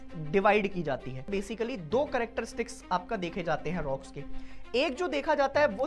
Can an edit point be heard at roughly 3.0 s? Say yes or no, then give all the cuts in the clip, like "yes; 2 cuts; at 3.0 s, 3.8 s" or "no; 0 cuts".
no; 1 cut; at 1.4 s